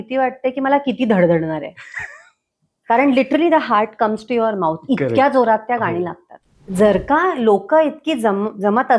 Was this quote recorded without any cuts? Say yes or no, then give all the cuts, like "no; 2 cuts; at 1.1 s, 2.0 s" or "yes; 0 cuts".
no; 1 cut; at 6.6 s